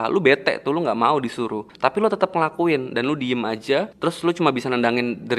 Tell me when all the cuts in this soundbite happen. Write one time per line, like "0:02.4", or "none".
0:01.6
0:03.9